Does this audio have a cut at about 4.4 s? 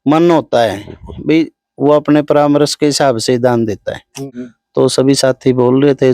no; 0 cuts

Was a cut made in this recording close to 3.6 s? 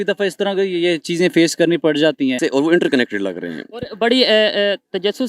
no; 1 cut; at 2.4 s

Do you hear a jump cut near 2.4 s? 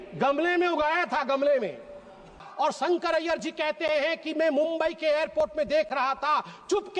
yes; 1 cut; at 2.4 s

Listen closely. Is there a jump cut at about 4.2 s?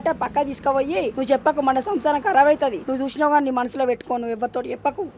no; 2 cuts; at 1.1 s, 2.8 s

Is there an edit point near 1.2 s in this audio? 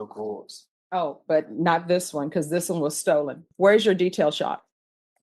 no; 1 cut; at 3.5 s

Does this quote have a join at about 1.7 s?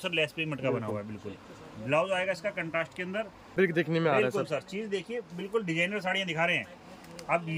no; 1 cut; at 3.5 s

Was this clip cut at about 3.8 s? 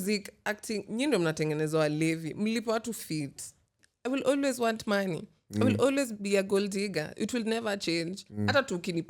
yes; 1 cut; at 3.8 s

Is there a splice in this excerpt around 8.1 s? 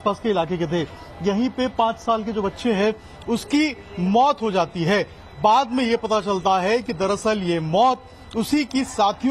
no; 1 cut; at 3.8 s

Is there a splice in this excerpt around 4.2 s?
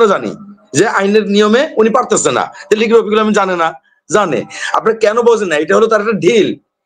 no; 0 cuts

